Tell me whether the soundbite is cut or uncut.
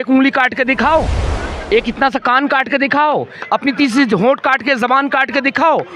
uncut